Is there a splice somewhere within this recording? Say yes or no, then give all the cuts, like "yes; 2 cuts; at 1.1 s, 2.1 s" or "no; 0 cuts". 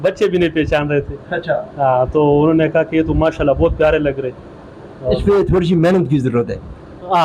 no; 0 cuts